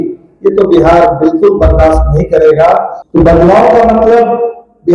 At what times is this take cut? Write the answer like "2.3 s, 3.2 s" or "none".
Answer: 3.0 s